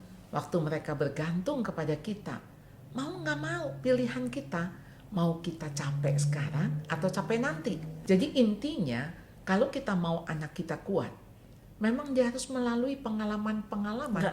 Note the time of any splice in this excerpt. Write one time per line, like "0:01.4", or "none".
0:07.9